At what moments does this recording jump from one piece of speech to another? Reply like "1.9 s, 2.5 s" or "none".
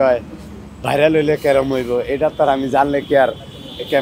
none

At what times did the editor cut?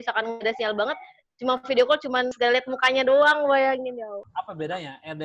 2.3 s, 4.2 s

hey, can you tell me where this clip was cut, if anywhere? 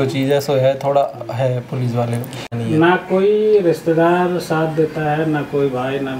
2.5 s

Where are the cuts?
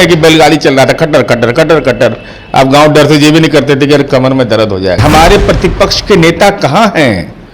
5.0 s

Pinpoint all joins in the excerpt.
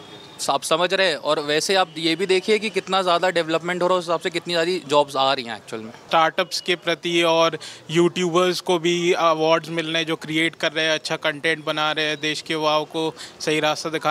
6.1 s

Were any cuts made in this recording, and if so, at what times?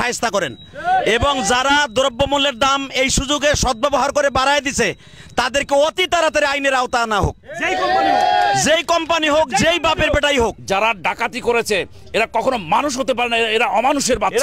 10.6 s

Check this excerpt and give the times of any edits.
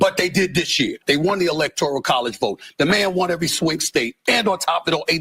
1.0 s

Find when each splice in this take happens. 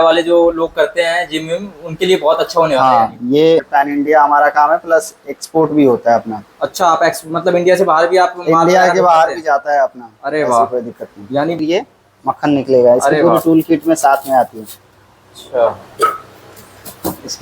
3.7 s, 11.6 s

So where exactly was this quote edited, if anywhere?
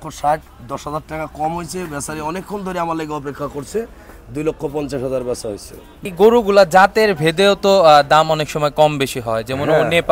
6.1 s

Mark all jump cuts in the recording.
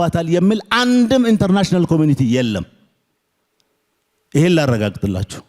none

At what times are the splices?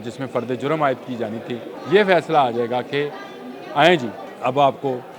1.7 s, 4.2 s

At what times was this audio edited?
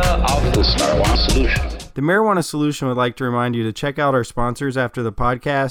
1.8 s

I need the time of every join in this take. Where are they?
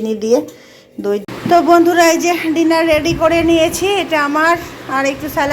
1.2 s

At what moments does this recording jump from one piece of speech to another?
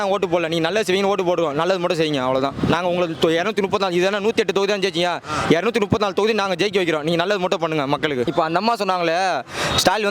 8.3 s

